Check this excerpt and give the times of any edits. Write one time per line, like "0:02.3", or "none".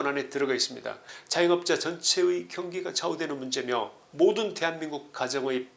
0:01.1
0:04.0